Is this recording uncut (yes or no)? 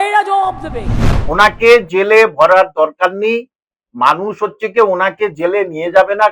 no